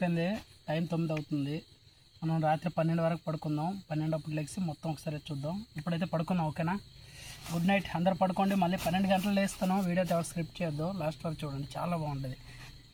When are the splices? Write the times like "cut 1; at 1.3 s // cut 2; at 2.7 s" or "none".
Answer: none